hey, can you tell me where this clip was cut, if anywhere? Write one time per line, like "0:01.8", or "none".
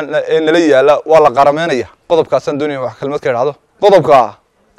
0:01.9
0:03.7

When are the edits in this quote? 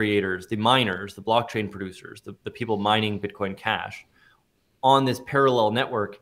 none

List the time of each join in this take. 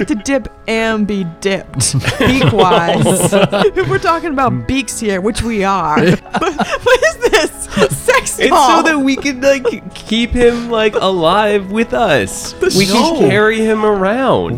0:03.6
0:06.2

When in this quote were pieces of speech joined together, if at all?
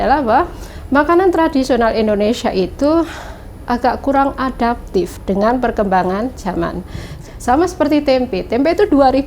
0:07.0

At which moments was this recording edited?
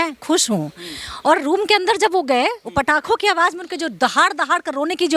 none

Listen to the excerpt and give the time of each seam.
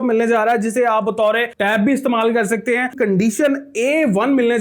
0:02.9

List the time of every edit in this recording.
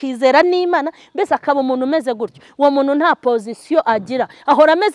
none

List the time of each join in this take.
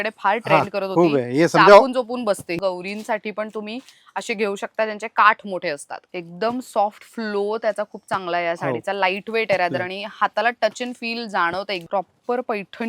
0:02.6
0:05.9
0:11.8

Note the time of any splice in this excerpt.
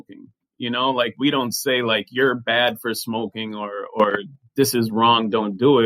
none

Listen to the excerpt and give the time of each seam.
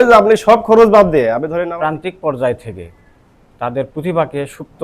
0:01.5

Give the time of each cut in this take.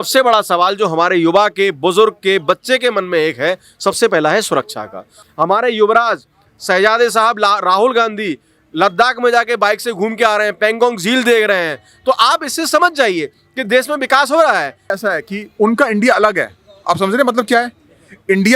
0:05.2
0:14.9

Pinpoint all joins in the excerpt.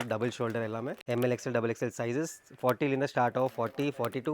0:01.0

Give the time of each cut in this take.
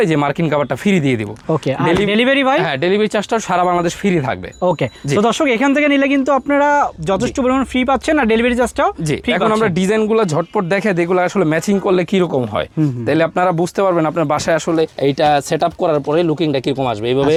none

